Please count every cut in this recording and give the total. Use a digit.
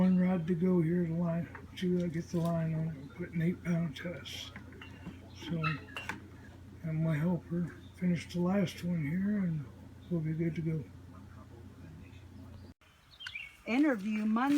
1